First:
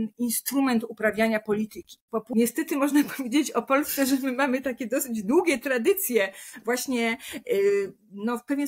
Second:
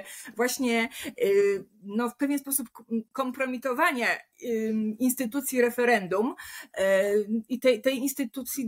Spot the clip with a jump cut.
first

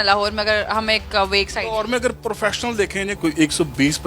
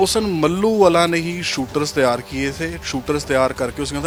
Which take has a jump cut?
first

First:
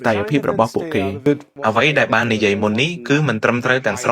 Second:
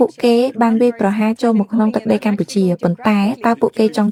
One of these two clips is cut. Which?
first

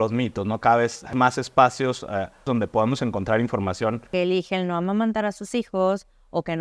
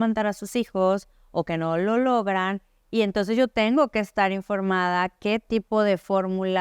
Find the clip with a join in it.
first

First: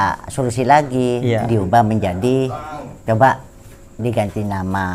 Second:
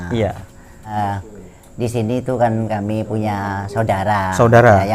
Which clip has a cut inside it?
second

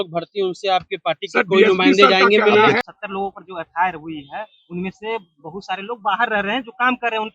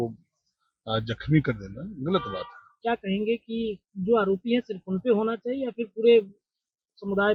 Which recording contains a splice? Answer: first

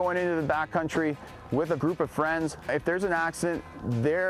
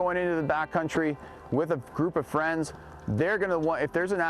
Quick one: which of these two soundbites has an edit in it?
first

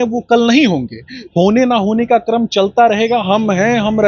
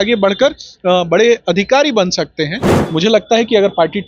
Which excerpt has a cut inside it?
second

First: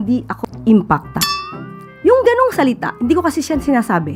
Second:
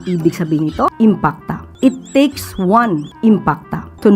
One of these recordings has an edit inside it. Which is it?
second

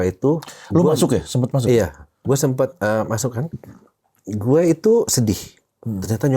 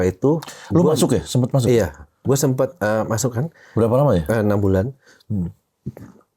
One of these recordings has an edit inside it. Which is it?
first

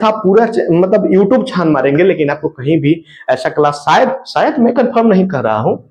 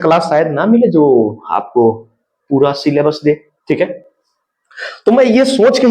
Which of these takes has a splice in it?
second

